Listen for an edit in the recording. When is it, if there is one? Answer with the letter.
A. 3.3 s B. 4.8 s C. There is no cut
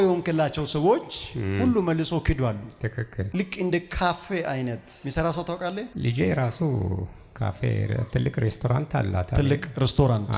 A